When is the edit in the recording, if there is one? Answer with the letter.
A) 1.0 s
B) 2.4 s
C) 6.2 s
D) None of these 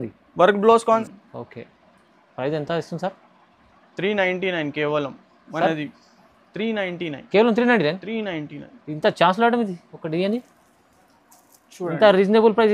A